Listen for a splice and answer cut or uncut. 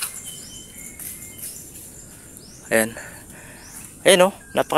uncut